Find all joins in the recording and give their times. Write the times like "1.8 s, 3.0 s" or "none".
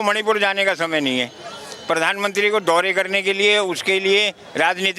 none